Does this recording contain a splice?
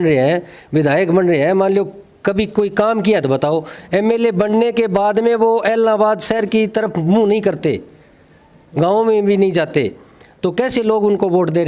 no; 0 cuts

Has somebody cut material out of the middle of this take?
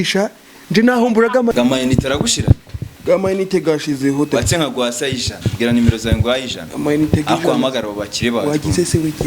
yes; 1 cut; at 1.5 s

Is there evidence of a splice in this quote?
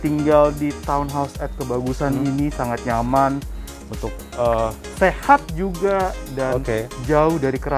no; 0 cuts

